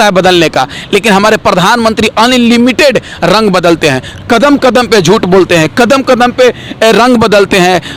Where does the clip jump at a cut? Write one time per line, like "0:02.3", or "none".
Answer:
none